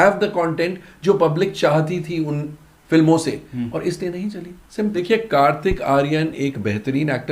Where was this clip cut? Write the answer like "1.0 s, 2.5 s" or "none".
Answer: 5.0 s